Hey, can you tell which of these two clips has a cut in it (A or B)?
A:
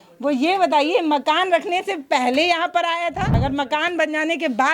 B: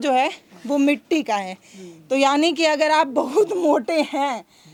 A